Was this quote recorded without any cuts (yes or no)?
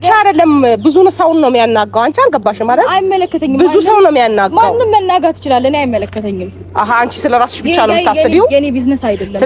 yes